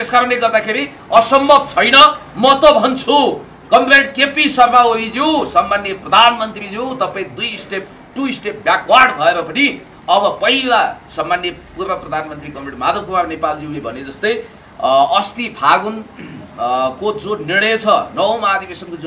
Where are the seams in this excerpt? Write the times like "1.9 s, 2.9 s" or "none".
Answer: none